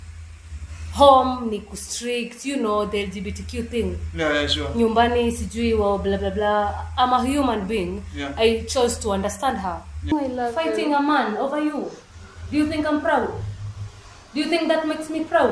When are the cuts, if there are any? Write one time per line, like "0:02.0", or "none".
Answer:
0:10.1